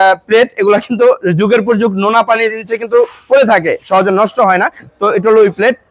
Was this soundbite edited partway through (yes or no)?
no